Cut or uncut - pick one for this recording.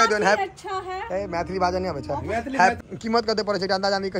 cut